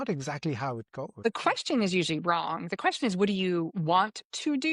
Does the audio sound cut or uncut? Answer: cut